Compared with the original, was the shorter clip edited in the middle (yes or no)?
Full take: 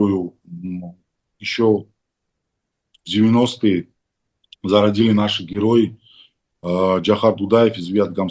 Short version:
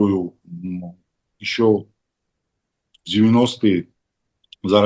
no